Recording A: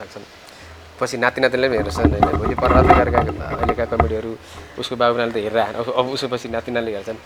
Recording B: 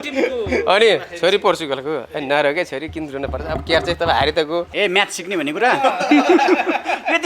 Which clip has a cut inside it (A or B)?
B